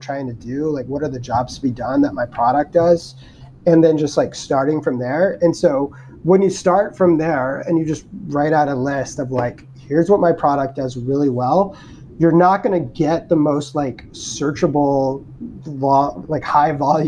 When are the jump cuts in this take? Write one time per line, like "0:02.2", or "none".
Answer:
none